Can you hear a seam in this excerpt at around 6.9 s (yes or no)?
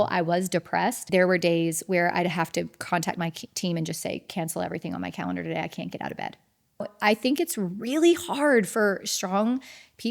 yes